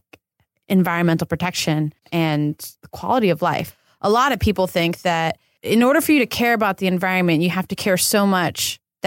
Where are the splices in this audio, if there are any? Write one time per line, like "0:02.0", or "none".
0:02.4
0:03.8
0:05.6